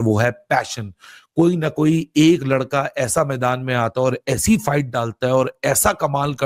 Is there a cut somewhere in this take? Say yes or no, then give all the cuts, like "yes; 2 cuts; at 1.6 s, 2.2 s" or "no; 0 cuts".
no; 0 cuts